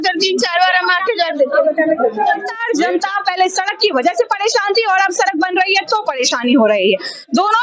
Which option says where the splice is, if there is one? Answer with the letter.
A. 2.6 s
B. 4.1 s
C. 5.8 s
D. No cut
A